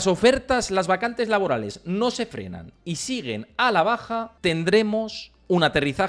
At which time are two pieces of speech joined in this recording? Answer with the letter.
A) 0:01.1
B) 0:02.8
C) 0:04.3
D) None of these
C